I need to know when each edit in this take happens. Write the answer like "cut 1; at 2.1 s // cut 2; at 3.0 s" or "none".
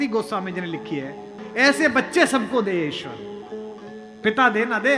cut 1; at 1.3 s